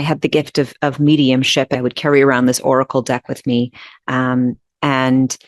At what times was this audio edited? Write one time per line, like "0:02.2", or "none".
0:01.8